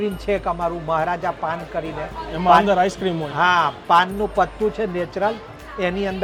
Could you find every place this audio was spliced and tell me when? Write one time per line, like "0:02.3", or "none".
none